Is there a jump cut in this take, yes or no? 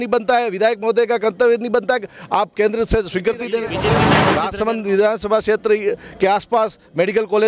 yes